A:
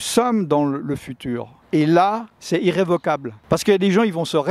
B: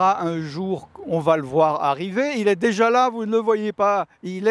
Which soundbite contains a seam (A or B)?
A